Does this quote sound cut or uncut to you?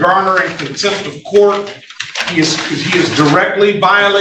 uncut